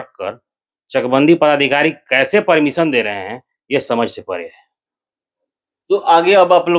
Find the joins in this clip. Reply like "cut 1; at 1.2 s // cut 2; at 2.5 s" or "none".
none